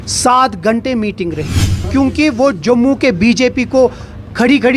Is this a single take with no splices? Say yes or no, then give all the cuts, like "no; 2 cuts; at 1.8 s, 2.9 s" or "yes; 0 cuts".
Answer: no; 1 cut; at 1.9 s